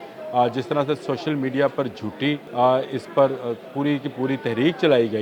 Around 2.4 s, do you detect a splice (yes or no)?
yes